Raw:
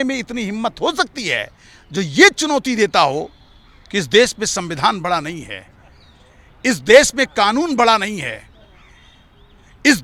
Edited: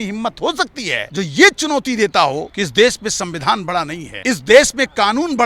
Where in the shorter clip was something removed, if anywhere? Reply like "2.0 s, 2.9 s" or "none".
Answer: 1.0 s, 2.5 s, 4.0 s